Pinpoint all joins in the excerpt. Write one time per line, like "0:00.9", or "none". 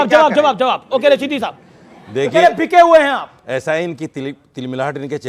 none